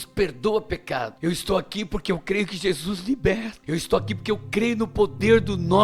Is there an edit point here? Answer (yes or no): yes